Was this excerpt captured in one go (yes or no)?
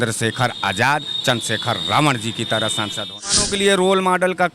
no